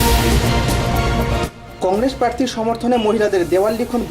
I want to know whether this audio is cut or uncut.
cut